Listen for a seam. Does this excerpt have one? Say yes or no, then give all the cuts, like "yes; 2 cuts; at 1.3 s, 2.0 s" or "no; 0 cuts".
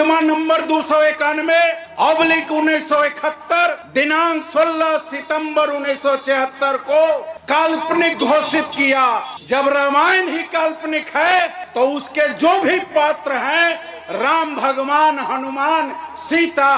no; 0 cuts